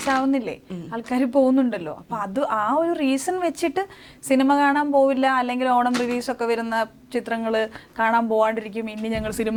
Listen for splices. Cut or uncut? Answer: uncut